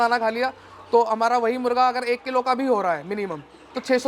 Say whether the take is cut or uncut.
uncut